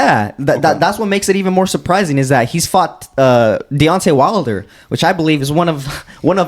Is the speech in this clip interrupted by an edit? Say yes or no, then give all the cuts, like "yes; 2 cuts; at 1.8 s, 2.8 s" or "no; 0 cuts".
no; 0 cuts